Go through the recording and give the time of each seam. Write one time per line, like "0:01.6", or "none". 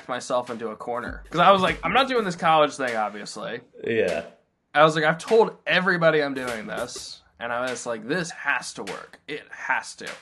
0:01.2